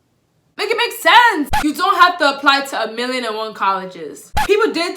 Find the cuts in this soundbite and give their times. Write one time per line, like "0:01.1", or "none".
0:01.5
0:04.1